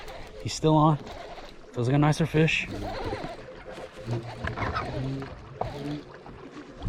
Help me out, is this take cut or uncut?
uncut